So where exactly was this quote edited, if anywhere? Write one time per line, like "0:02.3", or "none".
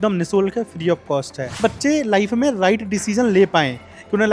0:01.6